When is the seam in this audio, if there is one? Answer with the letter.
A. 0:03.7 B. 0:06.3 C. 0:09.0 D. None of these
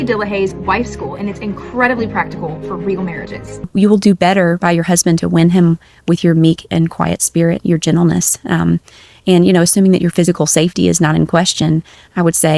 A